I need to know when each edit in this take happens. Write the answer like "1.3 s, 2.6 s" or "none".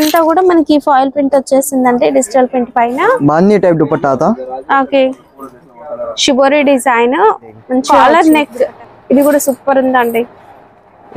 7.8 s

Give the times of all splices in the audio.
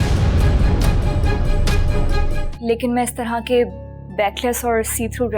2.4 s

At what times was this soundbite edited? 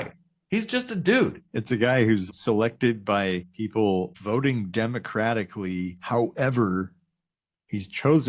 1.5 s, 2.2 s, 3.5 s, 4.2 s, 6.0 s

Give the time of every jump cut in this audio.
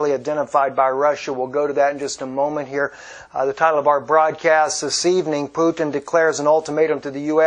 3.1 s

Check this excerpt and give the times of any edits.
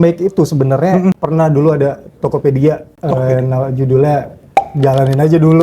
1.2 s, 2.9 s, 4.7 s

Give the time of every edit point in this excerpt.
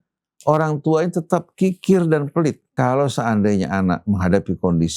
2.7 s

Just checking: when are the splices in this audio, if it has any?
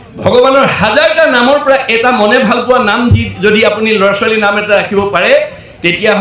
none

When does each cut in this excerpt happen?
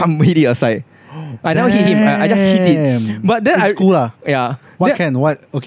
none

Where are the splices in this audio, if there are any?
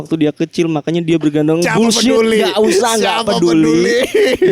none

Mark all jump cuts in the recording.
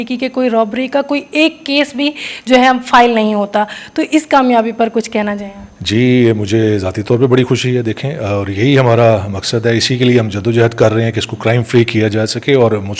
none

